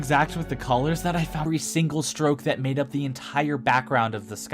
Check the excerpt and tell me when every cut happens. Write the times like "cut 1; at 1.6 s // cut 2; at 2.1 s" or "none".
cut 1; at 1.4 s